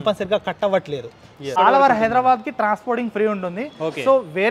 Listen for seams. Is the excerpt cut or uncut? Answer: cut